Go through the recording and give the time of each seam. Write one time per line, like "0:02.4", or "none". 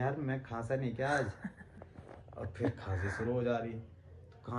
none